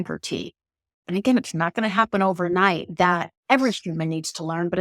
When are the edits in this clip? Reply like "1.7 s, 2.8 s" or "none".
1.1 s